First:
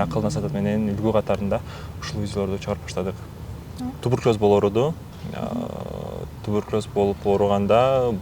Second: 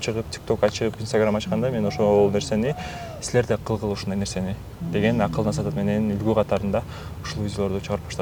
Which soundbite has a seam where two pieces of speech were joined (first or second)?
first